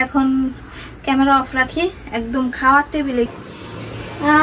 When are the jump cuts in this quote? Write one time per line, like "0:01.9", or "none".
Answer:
0:03.3